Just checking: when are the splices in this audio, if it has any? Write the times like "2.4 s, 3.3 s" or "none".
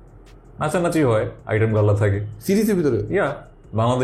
none